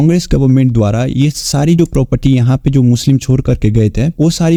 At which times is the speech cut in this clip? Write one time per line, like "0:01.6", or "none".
none